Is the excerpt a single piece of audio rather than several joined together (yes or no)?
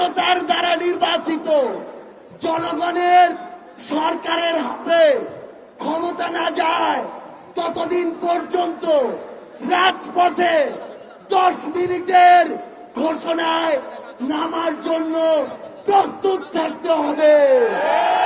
yes